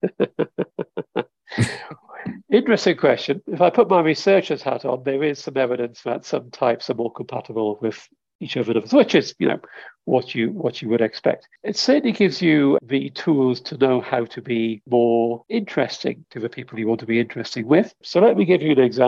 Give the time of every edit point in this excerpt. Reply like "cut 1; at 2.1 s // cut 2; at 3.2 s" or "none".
cut 1; at 11.5 s // cut 2; at 12.8 s // cut 3; at 14.8 s // cut 4; at 15.4 s // cut 5; at 16.3 s // cut 6; at 18.0 s